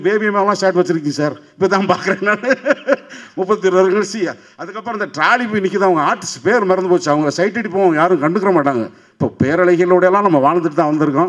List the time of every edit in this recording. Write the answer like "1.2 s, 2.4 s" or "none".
none

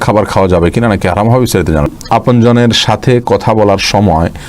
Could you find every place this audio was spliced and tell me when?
1.9 s

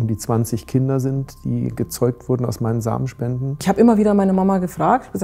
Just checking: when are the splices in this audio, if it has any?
3.6 s

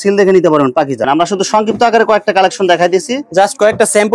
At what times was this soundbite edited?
1.0 s

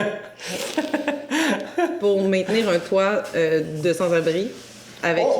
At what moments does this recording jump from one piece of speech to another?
2.0 s

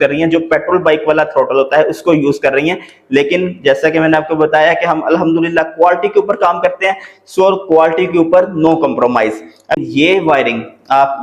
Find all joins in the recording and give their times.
9.8 s

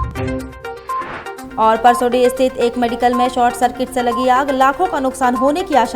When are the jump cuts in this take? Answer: 0.9 s

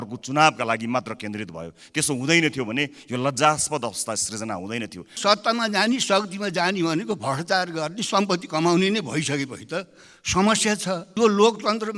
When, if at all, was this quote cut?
5.2 s

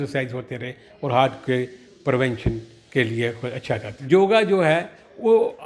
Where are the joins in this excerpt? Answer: 3.9 s

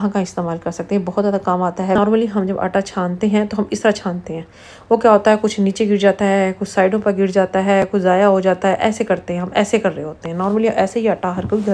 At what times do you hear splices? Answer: 2.0 s

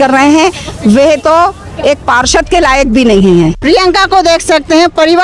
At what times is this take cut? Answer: 3.6 s

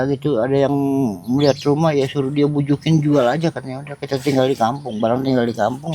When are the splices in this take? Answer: none

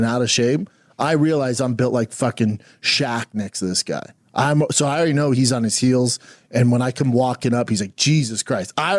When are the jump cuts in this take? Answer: none

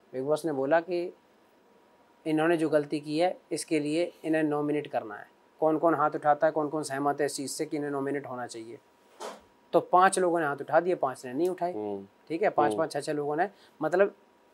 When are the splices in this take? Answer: none

